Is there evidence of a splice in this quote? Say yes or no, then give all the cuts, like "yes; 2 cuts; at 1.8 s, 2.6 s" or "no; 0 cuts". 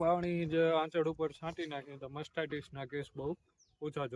no; 0 cuts